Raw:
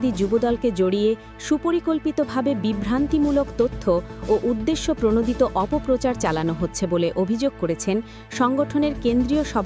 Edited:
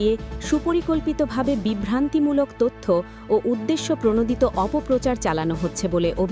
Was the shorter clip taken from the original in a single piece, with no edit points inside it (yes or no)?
yes